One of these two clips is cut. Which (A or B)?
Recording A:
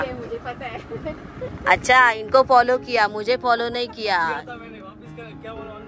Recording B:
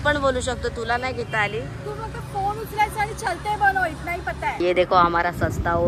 B